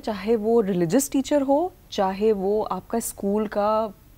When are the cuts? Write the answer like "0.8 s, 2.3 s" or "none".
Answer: none